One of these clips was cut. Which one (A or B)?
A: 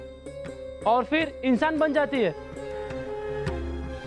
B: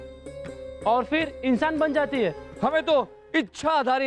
B